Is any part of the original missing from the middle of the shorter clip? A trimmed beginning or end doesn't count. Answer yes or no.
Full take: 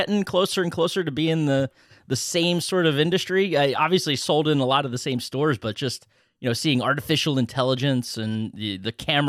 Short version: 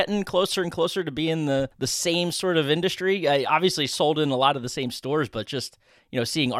yes